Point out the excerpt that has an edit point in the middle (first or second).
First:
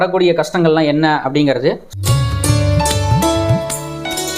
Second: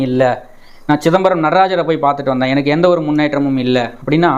first